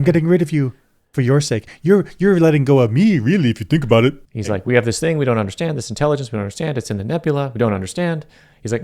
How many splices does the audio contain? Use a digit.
1